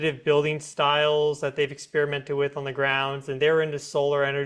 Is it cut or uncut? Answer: uncut